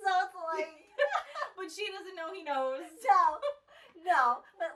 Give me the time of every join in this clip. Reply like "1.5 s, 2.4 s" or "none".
none